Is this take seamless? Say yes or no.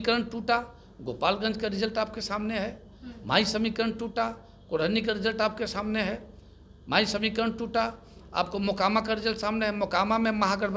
yes